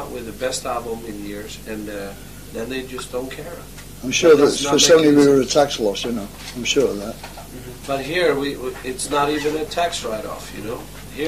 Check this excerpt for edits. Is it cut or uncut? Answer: cut